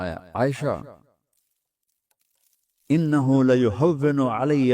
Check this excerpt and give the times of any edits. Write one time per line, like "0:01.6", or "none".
none